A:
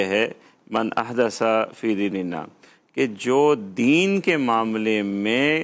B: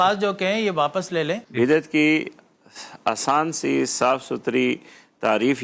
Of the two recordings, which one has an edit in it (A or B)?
B